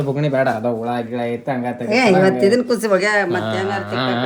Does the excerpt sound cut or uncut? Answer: uncut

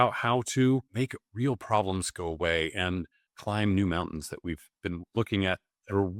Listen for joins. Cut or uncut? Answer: uncut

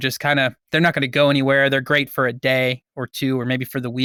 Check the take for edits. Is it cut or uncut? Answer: uncut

